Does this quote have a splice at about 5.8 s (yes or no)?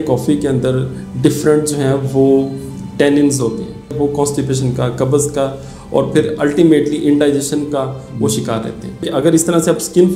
no